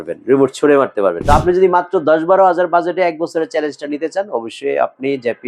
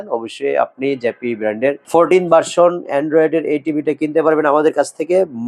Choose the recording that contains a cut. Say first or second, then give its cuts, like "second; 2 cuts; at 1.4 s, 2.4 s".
first; 1 cut; at 1.2 s